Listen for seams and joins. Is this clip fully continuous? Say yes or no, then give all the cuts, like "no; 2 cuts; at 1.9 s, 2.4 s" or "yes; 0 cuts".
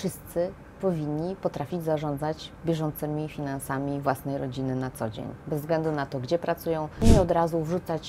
no; 1 cut; at 7.0 s